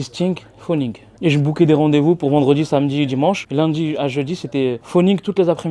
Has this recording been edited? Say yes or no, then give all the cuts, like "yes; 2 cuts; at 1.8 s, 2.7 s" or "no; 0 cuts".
no; 0 cuts